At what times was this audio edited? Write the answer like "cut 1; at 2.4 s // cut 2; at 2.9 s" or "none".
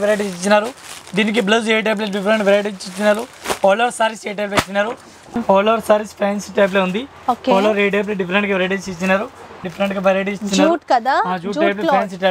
cut 1; at 5.4 s // cut 2; at 9.6 s